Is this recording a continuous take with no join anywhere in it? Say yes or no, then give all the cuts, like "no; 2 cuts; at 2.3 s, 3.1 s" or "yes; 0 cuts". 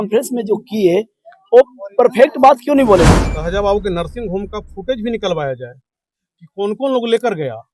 no; 1 cut; at 3.2 s